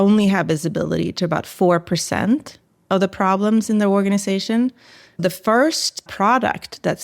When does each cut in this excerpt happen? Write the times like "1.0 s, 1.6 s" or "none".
5.2 s, 6.1 s